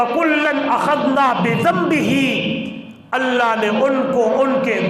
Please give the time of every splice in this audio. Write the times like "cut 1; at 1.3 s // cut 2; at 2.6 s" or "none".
none